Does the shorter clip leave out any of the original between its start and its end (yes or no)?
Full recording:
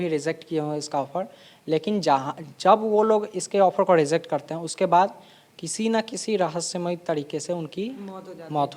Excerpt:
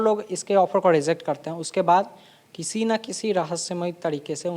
no